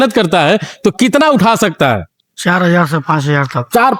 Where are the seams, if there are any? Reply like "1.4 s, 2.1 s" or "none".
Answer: none

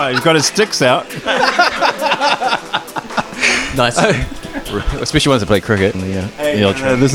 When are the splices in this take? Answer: 6.0 s

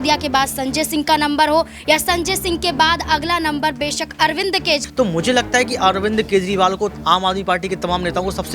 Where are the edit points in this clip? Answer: 4.9 s

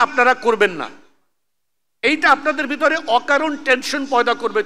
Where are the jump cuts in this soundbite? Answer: none

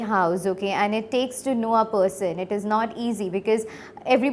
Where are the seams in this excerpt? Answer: none

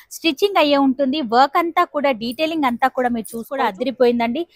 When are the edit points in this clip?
3.5 s

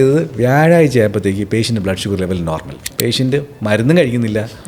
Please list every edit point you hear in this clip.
2.9 s

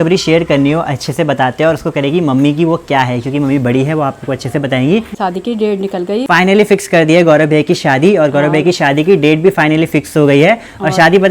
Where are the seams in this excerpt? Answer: 5.1 s, 6.3 s

